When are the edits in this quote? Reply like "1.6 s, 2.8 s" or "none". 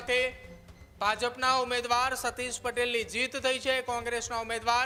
none